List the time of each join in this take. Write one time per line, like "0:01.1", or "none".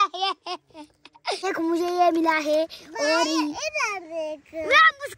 0:01.4